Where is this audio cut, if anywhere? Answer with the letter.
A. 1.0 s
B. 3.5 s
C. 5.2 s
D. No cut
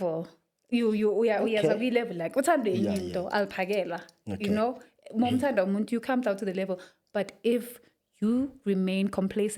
D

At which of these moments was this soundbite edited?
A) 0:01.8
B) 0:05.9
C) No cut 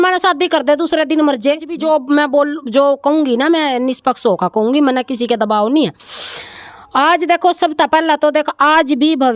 A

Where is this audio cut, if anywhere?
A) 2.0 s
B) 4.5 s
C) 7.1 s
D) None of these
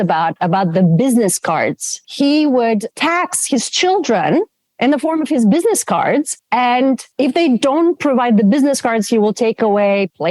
A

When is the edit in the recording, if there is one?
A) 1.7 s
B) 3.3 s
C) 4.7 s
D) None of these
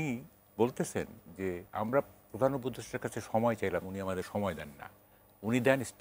A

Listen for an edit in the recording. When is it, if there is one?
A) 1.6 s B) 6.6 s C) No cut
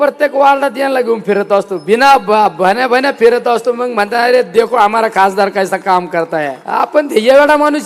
B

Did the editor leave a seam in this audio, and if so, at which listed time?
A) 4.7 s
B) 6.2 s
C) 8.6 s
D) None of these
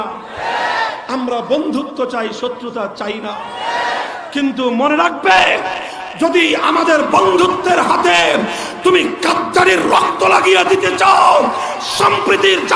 D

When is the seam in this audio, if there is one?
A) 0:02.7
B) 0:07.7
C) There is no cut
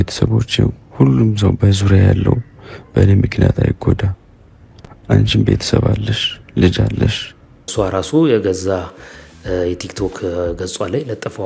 B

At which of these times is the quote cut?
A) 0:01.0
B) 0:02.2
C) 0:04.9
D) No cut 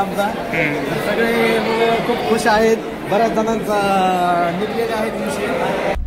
D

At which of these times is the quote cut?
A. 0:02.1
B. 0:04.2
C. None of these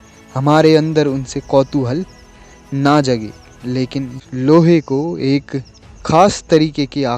B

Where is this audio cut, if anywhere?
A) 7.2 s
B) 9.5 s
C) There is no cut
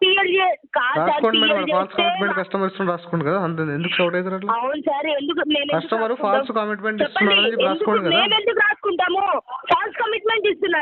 B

